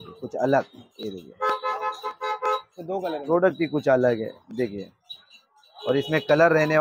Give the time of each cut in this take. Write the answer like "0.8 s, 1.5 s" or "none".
none